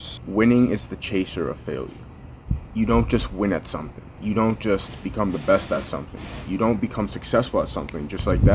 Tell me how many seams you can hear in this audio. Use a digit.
0